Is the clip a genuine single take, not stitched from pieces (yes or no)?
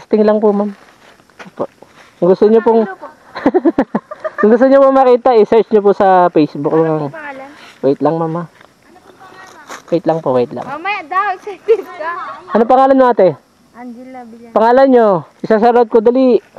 no